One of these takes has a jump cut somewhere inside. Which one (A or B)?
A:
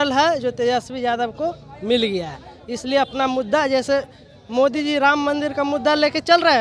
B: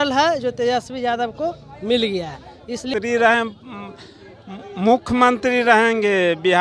B